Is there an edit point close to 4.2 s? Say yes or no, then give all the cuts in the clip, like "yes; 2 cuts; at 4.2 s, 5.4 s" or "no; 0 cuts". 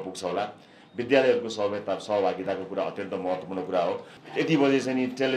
yes; 1 cut; at 4.2 s